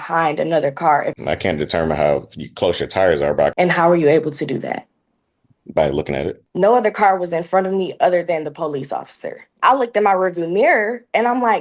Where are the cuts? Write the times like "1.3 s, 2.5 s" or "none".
1.1 s, 3.5 s, 6.4 s, 9.5 s